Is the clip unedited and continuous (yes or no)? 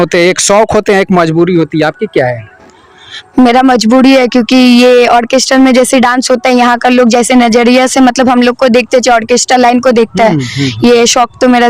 yes